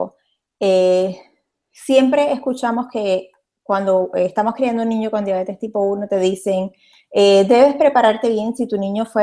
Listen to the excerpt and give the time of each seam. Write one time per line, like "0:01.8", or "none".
0:04.8